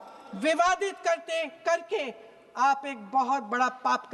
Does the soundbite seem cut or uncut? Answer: uncut